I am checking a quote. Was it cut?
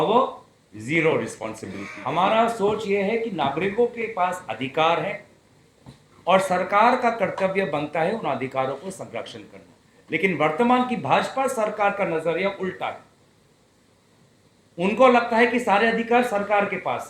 yes; 1 cut; at 1.9 s

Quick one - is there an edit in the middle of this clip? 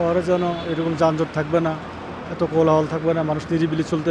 no; 0 cuts

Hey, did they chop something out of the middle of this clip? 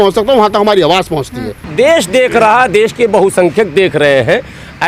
no; 0 cuts

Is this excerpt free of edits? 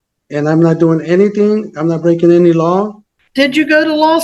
no; 1 cut; at 3.0 s

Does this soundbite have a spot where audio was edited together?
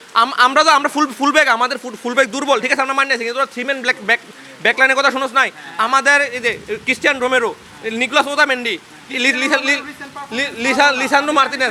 no; 0 cuts

